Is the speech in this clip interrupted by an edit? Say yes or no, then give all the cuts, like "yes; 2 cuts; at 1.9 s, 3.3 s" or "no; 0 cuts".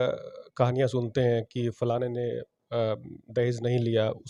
no; 0 cuts